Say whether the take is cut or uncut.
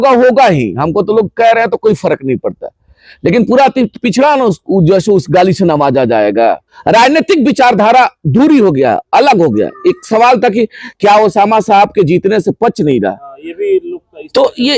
cut